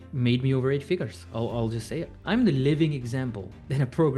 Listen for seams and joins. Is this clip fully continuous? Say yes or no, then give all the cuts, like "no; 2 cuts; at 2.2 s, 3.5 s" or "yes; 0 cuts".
no; 1 cut; at 2.1 s